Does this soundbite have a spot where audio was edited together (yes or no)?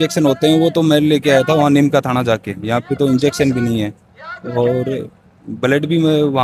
no